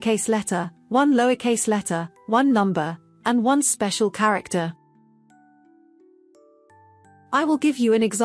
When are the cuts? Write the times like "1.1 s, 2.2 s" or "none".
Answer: 4.8 s, 7.3 s